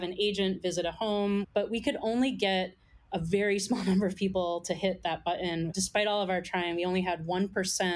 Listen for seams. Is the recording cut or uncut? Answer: cut